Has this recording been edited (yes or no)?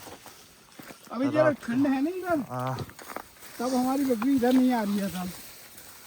no